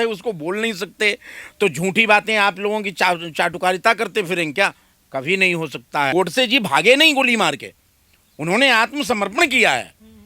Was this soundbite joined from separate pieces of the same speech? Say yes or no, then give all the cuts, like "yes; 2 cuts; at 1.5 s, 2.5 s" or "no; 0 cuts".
yes; 1 cut; at 6.1 s